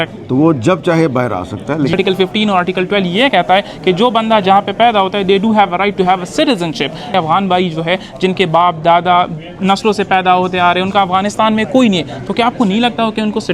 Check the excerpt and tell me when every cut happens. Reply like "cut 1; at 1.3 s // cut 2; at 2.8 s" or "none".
cut 1; at 1.9 s // cut 2; at 7.1 s